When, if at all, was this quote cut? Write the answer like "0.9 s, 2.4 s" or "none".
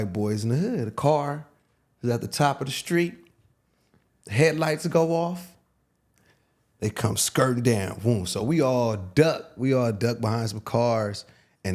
none